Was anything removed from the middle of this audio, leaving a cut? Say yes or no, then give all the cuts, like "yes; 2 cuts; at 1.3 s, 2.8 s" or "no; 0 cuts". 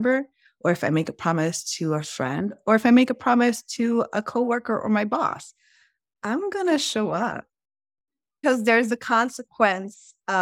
yes; 1 cut; at 8.4 s